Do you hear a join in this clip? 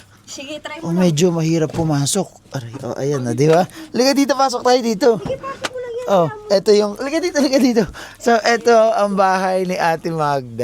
no; 0 cuts

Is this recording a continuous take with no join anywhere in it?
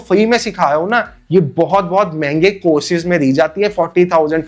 yes; 0 cuts

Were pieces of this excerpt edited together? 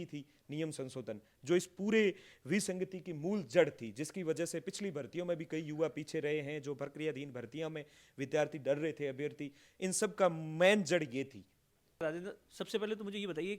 yes; 1 cut; at 12.0 s

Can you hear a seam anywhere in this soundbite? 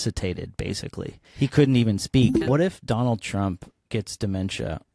yes; 3 cuts; at 1.2 s, 2.4 s, 3.7 s

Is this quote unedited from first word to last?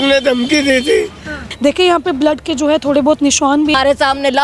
no; 2 cuts; at 1.5 s, 3.7 s

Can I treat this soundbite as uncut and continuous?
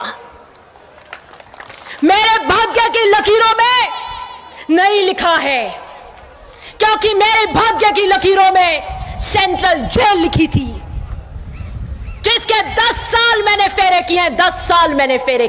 yes; 0 cuts

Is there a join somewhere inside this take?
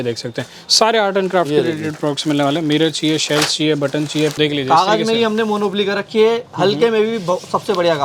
yes; 1 cut; at 4.4 s

